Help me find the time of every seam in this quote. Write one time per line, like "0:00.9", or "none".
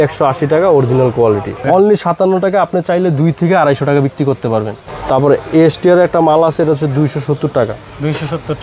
0:01.7
0:04.8